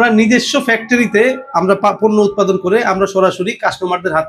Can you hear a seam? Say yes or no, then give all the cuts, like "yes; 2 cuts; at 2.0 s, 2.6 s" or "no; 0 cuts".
no; 0 cuts